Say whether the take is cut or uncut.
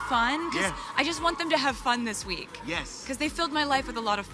uncut